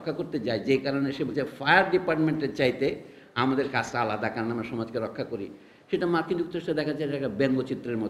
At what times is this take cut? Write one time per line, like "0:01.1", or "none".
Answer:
none